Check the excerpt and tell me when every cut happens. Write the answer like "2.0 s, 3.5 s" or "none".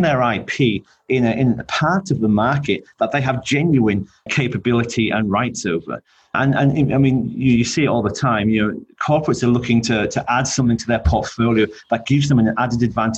none